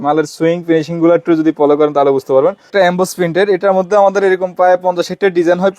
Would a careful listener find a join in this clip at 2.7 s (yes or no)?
yes